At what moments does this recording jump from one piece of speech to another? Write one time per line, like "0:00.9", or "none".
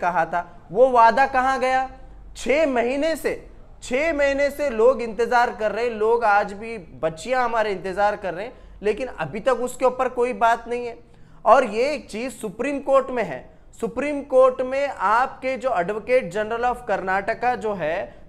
none